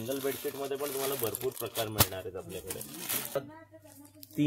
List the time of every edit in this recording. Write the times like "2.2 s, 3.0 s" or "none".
3.4 s